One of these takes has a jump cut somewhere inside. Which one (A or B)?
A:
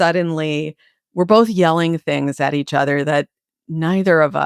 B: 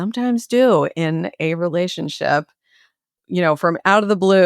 B